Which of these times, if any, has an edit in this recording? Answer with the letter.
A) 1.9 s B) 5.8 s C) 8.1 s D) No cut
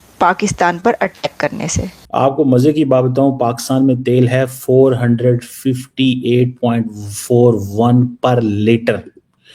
A